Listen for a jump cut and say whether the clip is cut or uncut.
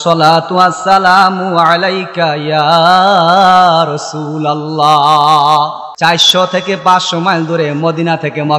cut